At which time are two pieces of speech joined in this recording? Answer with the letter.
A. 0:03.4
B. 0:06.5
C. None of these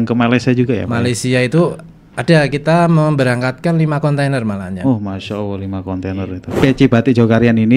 B